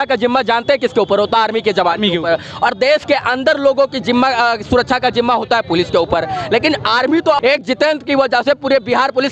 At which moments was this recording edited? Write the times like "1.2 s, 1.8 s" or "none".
7.4 s